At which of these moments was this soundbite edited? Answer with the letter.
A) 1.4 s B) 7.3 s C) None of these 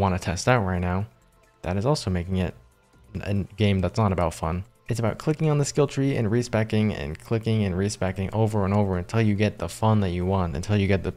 C